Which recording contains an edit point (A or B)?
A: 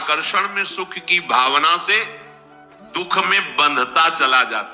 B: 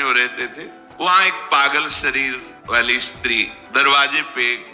B